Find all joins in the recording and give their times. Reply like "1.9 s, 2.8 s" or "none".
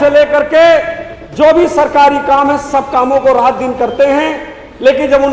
none